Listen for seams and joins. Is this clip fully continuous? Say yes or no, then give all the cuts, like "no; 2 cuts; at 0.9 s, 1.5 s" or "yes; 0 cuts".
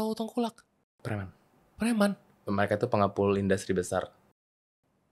yes; 0 cuts